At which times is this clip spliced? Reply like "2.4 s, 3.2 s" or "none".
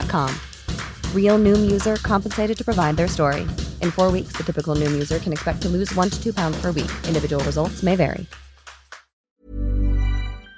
9.2 s